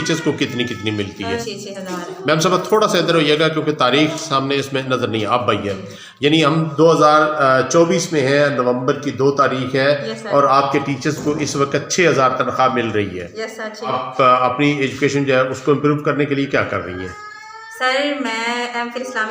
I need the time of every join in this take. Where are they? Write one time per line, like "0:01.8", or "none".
0:01.4
0:13.9